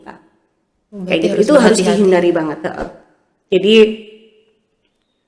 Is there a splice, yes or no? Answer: no